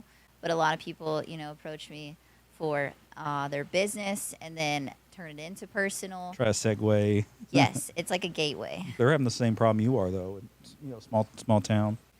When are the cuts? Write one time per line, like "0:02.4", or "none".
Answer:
0:08.9